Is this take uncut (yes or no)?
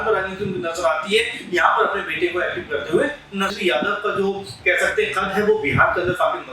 no